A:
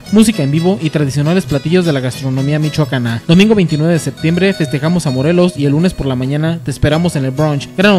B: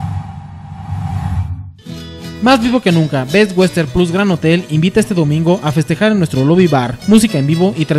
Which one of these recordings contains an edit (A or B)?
B